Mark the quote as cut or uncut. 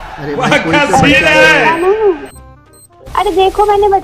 uncut